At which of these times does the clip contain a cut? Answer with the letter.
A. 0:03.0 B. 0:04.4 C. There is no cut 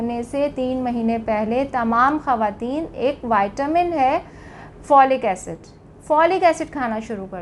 C